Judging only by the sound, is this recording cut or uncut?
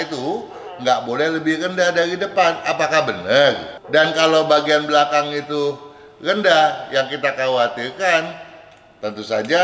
cut